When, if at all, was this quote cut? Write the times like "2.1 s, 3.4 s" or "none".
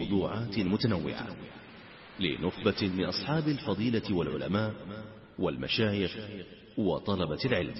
none